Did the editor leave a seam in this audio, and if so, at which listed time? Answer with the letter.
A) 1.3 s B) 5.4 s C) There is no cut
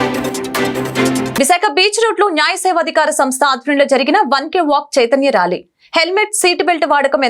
A